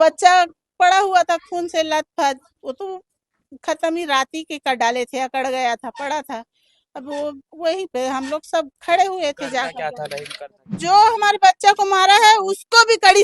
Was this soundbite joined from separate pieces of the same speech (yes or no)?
yes